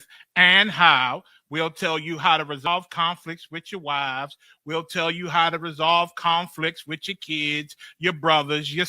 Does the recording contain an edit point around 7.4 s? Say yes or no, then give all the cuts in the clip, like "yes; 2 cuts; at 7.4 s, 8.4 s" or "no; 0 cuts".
no; 1 cut; at 2.7 s